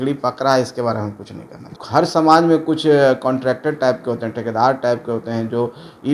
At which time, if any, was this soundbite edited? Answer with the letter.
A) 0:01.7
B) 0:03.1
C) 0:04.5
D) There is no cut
A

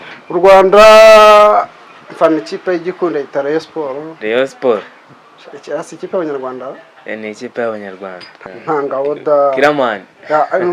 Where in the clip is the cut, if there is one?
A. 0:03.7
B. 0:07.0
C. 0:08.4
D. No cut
C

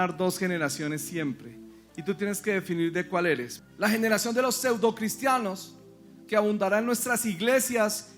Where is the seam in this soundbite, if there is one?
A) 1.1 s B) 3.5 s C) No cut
B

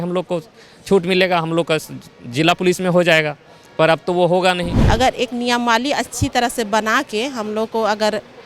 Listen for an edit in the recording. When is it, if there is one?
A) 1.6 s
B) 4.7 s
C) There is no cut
B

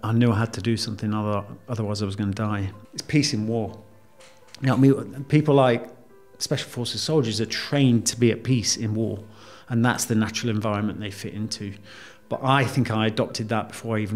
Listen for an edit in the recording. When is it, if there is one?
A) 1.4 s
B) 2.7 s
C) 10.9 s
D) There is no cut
B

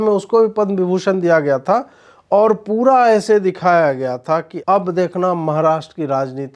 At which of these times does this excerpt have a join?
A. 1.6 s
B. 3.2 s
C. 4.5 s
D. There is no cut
C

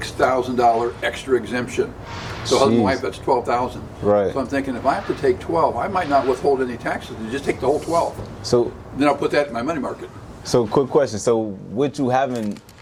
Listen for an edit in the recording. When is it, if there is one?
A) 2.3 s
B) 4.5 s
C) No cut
C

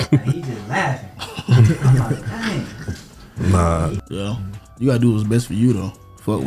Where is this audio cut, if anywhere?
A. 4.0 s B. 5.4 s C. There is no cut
A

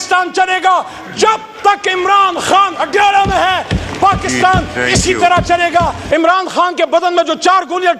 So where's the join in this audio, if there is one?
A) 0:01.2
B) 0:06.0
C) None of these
B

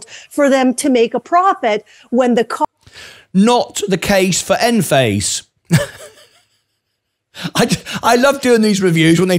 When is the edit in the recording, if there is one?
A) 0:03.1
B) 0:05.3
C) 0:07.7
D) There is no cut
D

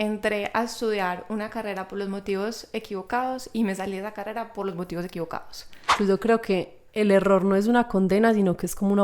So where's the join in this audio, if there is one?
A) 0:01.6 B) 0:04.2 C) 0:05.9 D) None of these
C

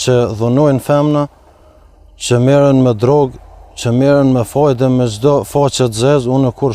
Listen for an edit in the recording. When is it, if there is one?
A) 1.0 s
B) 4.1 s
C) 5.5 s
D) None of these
A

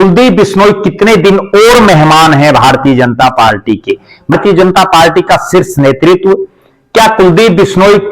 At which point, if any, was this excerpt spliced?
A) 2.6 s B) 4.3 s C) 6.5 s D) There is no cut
B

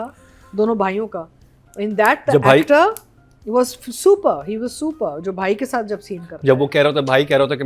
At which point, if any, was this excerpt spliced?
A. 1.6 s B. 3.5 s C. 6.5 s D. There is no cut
D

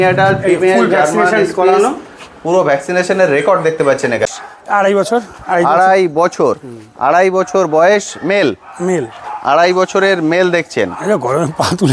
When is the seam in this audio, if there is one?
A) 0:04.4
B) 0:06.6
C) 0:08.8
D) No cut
A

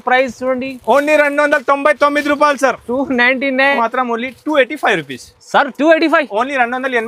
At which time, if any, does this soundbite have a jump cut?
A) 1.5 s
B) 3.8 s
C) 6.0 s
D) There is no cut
B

